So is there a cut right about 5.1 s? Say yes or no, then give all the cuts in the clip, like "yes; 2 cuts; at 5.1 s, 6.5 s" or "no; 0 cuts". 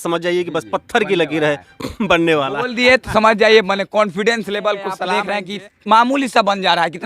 yes; 1 cut; at 5.1 s